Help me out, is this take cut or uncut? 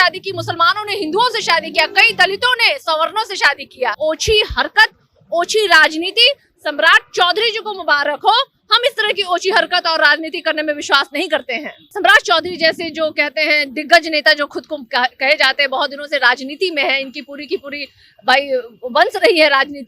cut